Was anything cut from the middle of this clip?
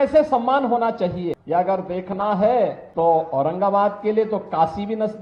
yes; 2 cuts; at 1.4 s, 2.8 s

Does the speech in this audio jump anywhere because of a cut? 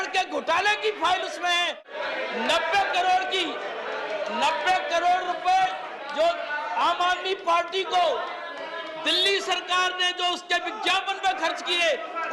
yes; 1 cut; at 1.8 s

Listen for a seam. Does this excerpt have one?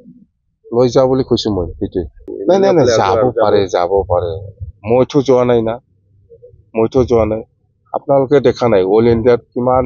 yes; 1 cut; at 2.3 s

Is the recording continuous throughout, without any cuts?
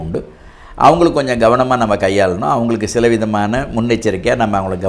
yes; 0 cuts

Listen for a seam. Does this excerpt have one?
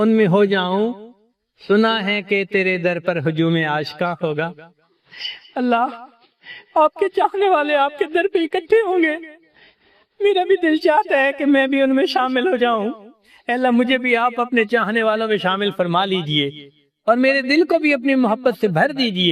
no; 0 cuts

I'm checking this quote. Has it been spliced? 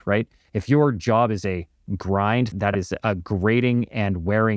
yes; 1 cut; at 2.5 s

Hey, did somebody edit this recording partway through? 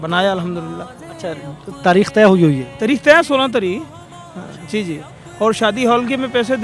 no; 0 cuts

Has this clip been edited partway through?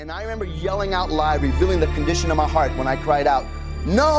no; 0 cuts

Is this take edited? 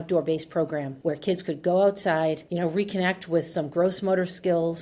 yes; 2 cuts; at 0.9 s, 2.4 s

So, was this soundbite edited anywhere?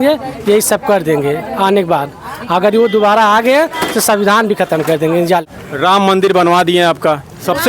yes; 1 cut; at 5.5 s

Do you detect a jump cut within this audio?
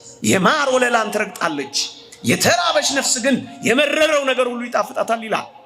no; 0 cuts

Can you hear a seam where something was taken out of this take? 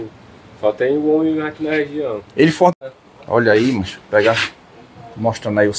yes; 1 cut; at 2.7 s

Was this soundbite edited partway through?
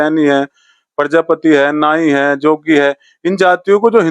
no; 0 cuts

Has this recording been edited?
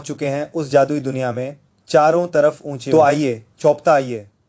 yes; 1 cut; at 2.7 s

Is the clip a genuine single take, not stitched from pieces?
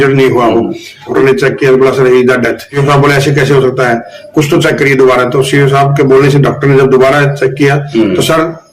no; 2 cuts; at 1.1 s, 2.8 s

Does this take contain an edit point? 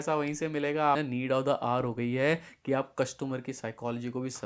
yes; 1 cut; at 1.0 s

